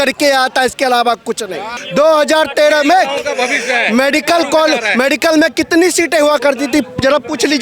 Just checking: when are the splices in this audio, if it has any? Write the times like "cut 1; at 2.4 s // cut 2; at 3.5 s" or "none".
cut 1; at 1.7 s

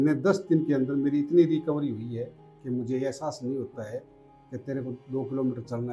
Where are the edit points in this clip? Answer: none

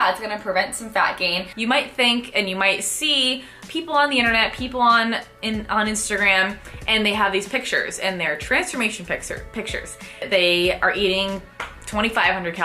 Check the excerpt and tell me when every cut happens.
cut 1; at 1.5 s // cut 2; at 10.3 s

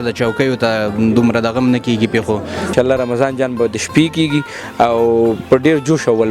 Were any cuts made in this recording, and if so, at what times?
cut 1; at 2.7 s

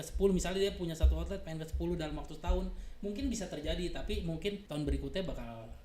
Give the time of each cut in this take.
cut 1; at 4.6 s

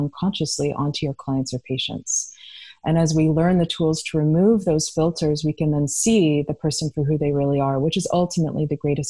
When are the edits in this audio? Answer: none

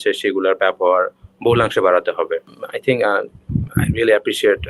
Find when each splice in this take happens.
cut 1; at 2.5 s

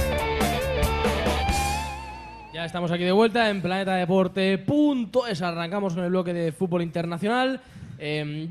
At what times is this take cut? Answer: none

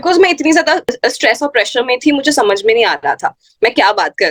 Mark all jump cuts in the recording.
cut 1; at 0.9 s

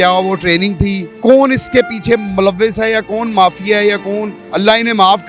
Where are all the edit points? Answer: cut 1; at 1.1 s // cut 2; at 4.4 s

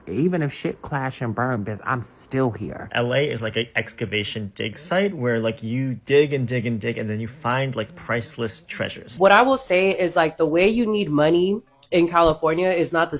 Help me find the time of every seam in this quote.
cut 1; at 2.9 s // cut 2; at 9.1 s

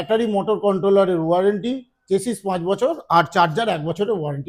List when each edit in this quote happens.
none

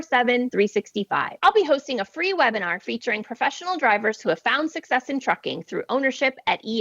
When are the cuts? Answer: none

